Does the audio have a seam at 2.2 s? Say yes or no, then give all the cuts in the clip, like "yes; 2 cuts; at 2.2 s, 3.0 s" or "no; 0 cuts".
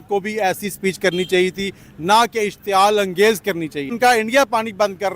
no; 1 cut; at 3.9 s